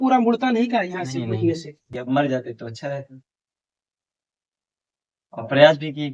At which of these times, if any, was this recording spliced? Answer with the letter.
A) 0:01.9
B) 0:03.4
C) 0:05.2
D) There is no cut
A